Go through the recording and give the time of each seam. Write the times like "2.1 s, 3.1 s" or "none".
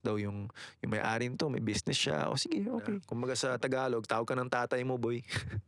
3.1 s